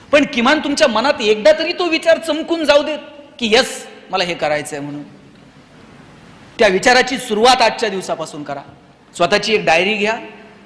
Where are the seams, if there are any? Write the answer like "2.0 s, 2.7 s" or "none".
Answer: none